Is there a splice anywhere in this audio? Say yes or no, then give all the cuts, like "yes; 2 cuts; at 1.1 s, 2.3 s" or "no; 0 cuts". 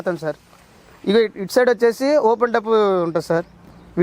no; 0 cuts